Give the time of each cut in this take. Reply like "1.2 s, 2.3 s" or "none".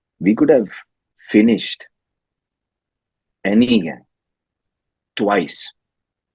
none